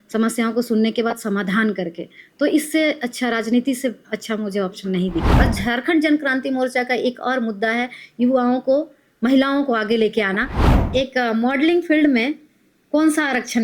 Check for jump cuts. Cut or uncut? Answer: cut